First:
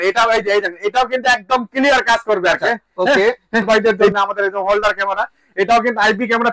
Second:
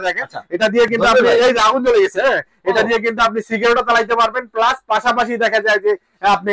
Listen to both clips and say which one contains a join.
first; 1 cut; at 3.7 s

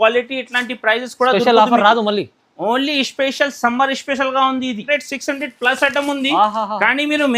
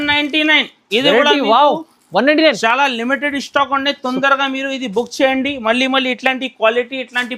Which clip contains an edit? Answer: first; 1 cut; at 4.8 s

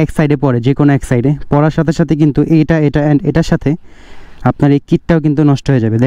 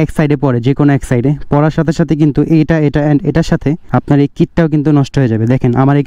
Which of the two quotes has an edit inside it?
second; 1 cut; at 3.8 s

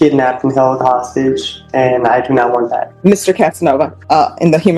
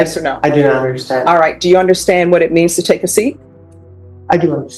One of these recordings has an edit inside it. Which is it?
first; 2 cuts; at 2.9 s, 4.0 s

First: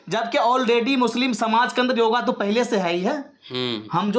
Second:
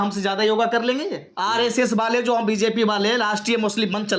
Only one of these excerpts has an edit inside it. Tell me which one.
second; 1 cut; at 1.2 s

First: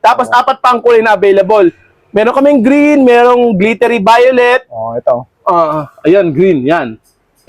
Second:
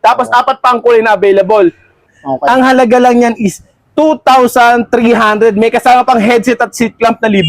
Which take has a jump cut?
second; 1 cut; at 2.1 s

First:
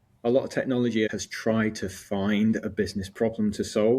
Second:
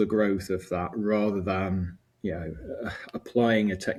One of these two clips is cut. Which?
first; 1 cut; at 1.1 s

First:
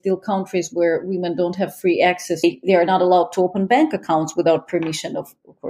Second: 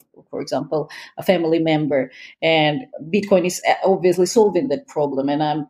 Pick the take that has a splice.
first; 1 cut; at 2.4 s

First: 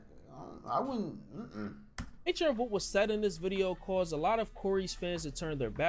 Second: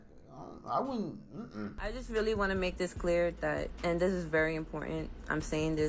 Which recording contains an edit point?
second; 1 cut; at 1.8 s

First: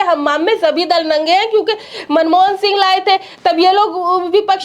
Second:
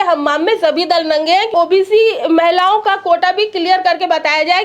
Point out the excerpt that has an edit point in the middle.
second; 1 cut; at 1.5 s

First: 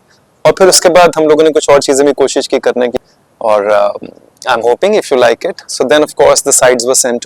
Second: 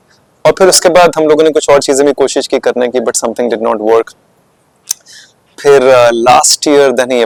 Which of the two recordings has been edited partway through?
first; 1 cut; at 3.0 s

